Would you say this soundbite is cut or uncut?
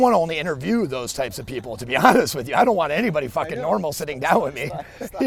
uncut